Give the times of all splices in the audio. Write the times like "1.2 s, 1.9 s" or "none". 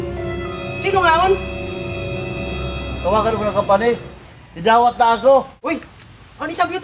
0.8 s, 1.4 s, 3.0 s